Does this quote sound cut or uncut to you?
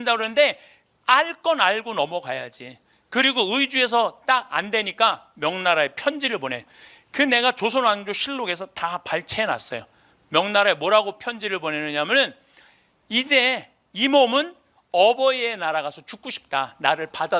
uncut